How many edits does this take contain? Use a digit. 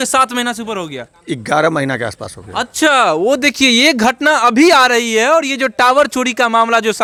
0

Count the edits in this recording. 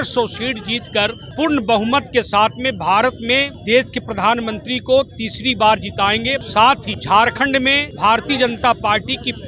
4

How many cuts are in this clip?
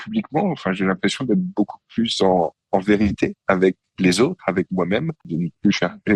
1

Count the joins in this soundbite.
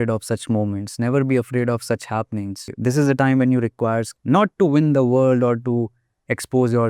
2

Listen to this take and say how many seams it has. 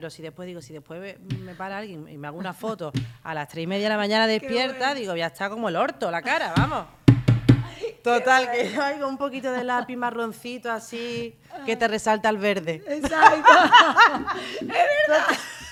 0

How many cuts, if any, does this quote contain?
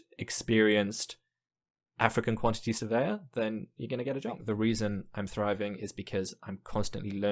1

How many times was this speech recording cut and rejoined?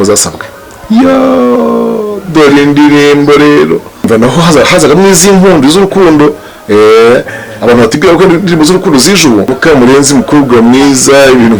2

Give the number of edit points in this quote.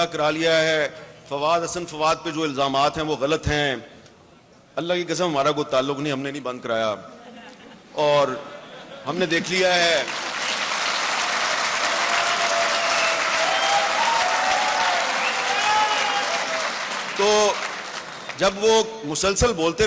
0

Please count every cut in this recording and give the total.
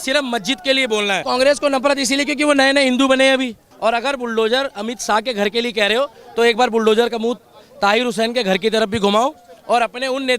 2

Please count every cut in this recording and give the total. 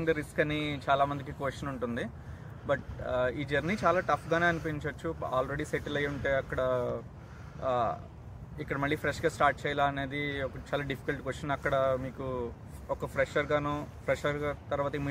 0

